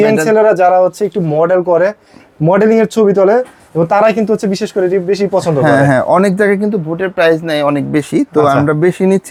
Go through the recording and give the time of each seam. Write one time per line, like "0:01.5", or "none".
none